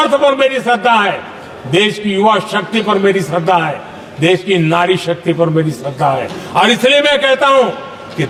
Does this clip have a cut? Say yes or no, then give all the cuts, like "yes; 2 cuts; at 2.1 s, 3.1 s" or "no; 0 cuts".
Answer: no; 0 cuts